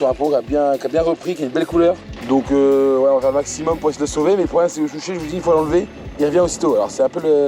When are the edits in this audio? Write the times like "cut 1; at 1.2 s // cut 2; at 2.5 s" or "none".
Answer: cut 1; at 2.1 s